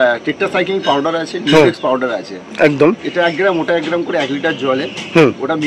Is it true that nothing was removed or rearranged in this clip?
yes; 0 cuts

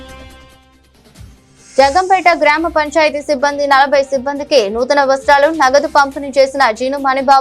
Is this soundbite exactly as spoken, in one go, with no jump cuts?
yes; 0 cuts

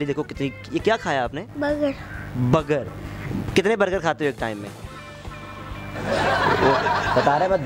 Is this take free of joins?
yes; 0 cuts

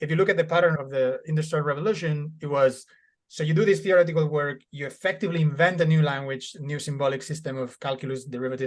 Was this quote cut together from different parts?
no; 0 cuts

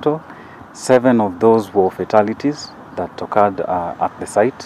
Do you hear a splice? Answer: no; 0 cuts

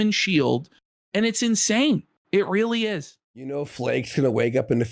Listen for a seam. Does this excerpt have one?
yes; 1 cut; at 3.4 s

